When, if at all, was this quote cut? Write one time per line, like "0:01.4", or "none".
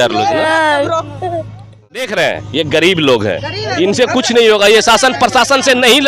0:02.0